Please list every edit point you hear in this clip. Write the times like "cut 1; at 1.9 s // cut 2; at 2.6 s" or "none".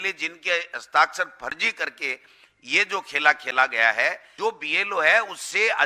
cut 1; at 4.3 s